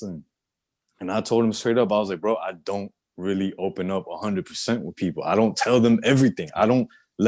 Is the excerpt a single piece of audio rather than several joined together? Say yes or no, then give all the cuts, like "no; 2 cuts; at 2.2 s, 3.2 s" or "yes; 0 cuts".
yes; 0 cuts